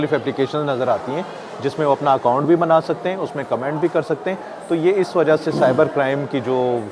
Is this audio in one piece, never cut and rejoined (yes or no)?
yes